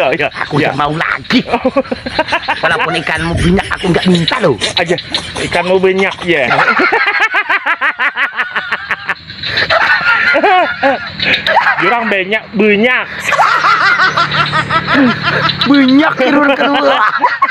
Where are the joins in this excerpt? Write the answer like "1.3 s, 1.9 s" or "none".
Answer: 11.4 s